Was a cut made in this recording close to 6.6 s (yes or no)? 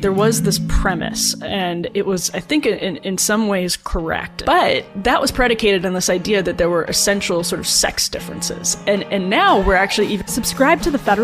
no